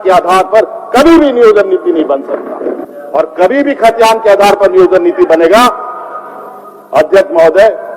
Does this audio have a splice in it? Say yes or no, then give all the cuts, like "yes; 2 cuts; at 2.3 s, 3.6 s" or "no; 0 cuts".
yes; 1 cut; at 2.8 s